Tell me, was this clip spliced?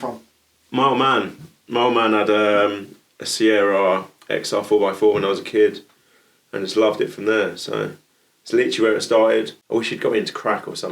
yes; 1 cut; at 9.6 s

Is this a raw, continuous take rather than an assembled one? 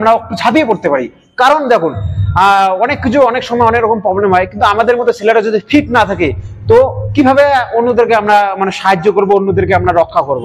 yes; 0 cuts

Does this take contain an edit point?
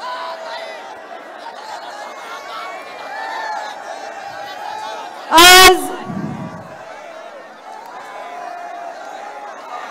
yes; 1 cut; at 1.5 s

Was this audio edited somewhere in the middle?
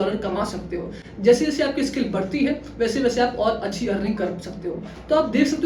no; 0 cuts

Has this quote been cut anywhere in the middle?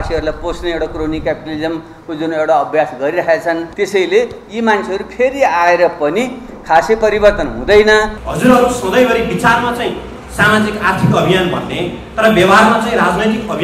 yes; 2 cuts; at 3.7 s, 8.2 s

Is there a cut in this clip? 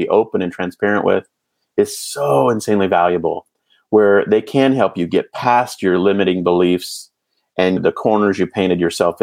yes; 1 cut; at 7.8 s

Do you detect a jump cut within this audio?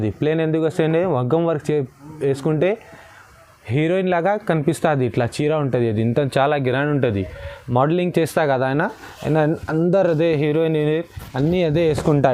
no; 0 cuts

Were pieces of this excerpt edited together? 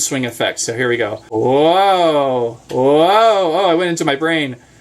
yes; 1 cut; at 1.3 s

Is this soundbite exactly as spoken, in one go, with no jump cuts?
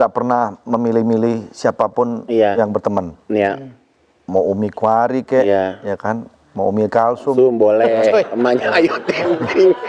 yes; 0 cuts

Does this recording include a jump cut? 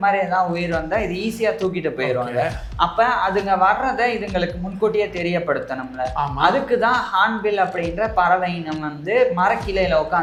no; 0 cuts

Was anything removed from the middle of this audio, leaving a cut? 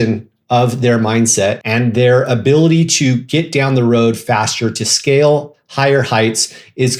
yes; 1 cut; at 1.6 s

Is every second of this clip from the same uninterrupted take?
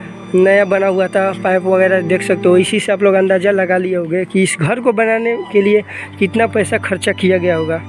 yes; 0 cuts

